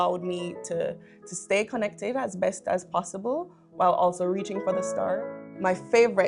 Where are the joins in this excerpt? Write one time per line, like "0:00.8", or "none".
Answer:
0:05.2